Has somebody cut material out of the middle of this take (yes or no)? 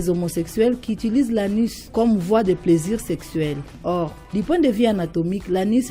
yes